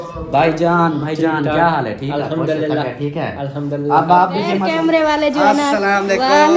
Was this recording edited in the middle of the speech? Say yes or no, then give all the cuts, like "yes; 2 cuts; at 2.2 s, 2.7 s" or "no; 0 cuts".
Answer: yes; 1 cut; at 4.6 s